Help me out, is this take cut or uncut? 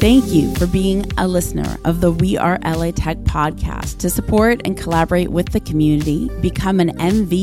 uncut